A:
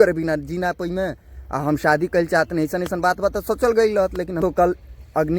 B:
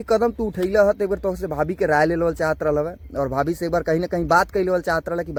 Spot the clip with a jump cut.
A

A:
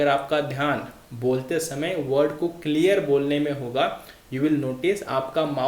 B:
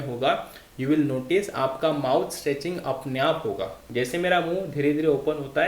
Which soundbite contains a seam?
B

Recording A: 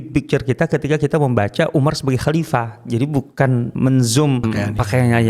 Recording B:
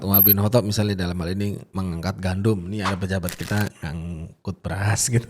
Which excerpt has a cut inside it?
A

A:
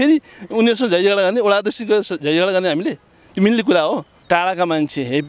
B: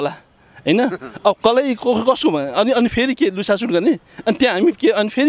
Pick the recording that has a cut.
A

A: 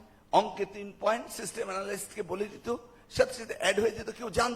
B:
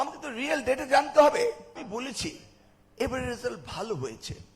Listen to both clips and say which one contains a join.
B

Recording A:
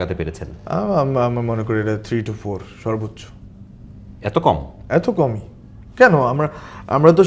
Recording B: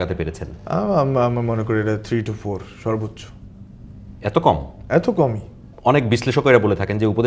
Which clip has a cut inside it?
B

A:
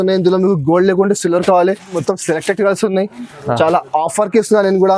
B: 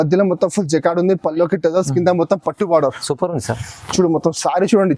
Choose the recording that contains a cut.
A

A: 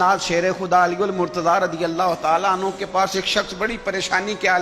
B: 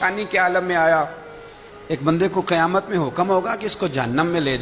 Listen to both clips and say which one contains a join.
B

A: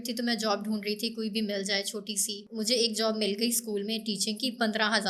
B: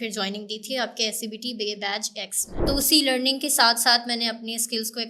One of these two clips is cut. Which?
B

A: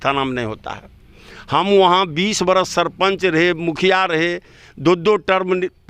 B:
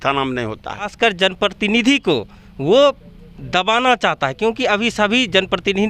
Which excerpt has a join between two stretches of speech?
B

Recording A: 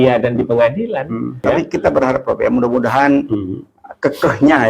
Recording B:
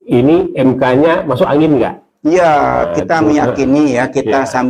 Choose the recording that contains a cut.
A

